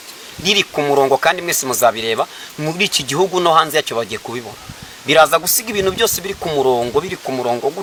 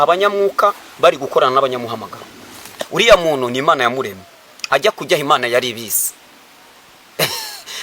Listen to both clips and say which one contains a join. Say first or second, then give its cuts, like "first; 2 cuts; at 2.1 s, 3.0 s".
second; 1 cut; at 2.8 s